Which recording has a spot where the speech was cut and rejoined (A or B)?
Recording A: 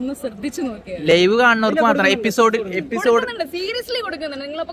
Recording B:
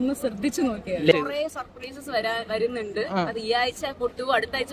B